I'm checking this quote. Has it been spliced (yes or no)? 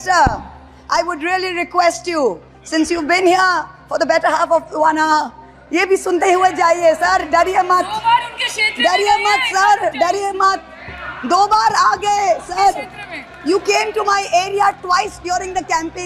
no